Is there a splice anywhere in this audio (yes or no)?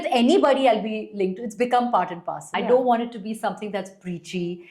yes